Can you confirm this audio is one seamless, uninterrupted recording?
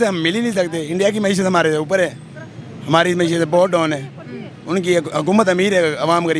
yes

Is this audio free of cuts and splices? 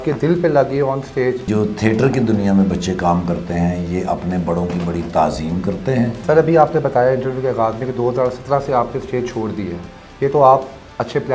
no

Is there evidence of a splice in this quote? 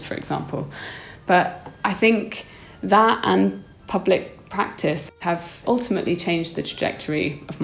yes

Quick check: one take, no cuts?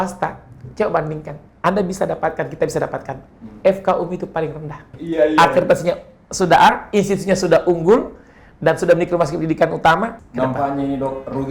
no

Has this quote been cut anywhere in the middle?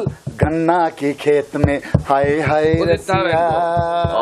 no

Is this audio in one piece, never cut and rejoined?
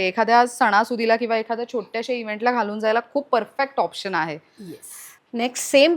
yes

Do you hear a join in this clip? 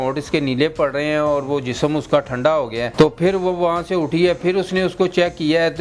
yes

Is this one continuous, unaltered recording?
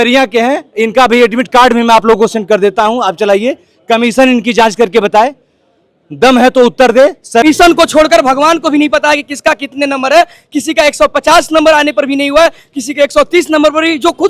no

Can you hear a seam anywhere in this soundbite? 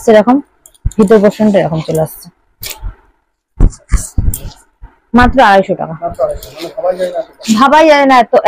no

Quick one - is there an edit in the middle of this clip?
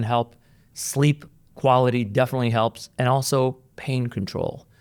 no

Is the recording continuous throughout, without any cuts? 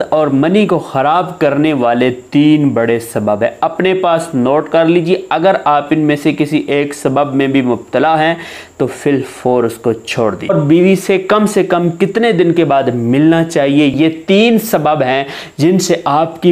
no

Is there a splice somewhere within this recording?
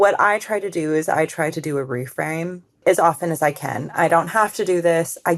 yes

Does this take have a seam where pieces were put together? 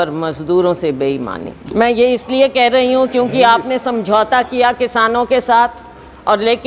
yes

